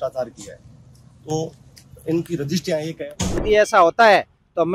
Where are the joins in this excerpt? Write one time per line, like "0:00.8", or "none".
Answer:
0:03.4